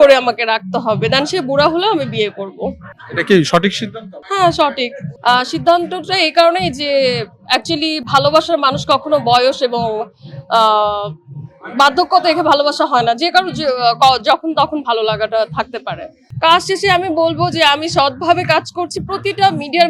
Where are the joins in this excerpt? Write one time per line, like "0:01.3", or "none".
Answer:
none